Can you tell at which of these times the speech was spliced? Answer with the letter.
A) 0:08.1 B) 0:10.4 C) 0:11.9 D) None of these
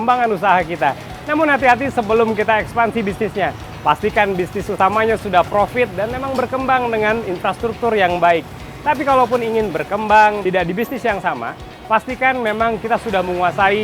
B